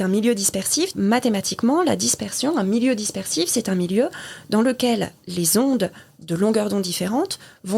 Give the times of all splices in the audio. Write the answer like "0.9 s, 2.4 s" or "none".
0.9 s